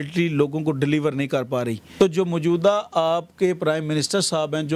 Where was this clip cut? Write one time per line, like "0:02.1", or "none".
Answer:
0:01.8